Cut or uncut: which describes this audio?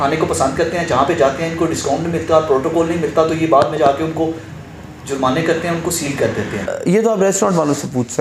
uncut